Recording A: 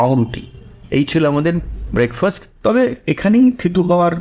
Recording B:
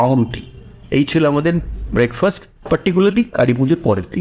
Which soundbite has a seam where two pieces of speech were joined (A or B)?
A